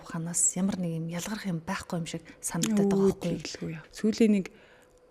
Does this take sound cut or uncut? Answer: cut